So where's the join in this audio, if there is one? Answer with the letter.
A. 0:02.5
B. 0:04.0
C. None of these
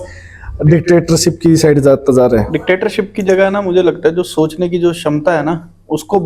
A